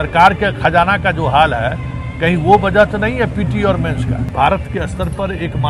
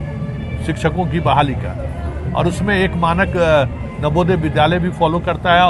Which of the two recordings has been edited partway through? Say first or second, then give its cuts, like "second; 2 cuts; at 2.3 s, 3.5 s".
first; 1 cut; at 4.3 s